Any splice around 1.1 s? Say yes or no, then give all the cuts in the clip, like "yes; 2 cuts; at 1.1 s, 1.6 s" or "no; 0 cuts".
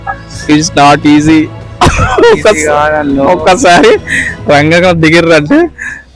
no; 0 cuts